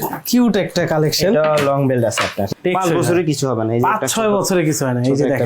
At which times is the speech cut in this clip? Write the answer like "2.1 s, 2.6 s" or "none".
2.5 s